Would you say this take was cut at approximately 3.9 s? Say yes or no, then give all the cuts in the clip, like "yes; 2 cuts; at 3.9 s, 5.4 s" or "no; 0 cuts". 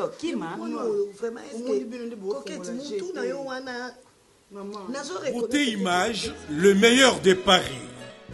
no; 1 cut; at 5.5 s